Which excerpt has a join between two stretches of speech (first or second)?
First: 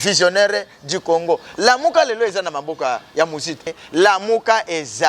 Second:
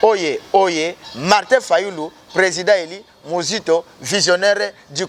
first